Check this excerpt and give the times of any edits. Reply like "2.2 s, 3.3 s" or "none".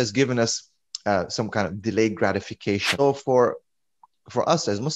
3.0 s